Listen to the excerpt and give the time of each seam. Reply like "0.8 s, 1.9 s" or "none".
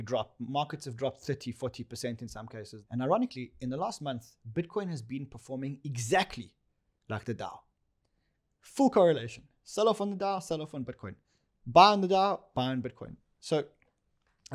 2.7 s

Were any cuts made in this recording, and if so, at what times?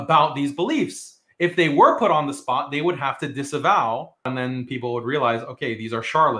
4.3 s

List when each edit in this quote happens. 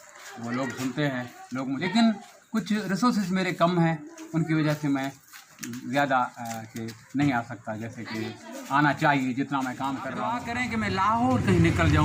1.8 s, 10.5 s

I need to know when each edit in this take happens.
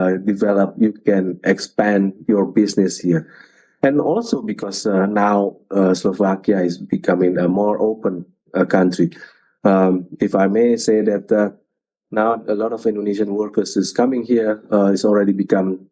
none

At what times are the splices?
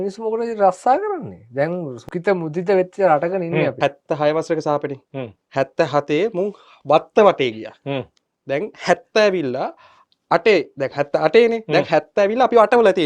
2.0 s, 3.7 s

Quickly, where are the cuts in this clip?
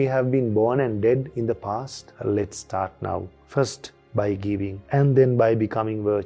2.1 s

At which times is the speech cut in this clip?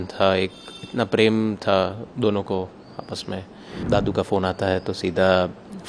3.8 s

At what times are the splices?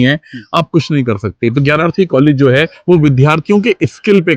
2.7 s

